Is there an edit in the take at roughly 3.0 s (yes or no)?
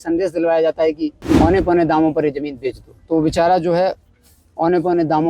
no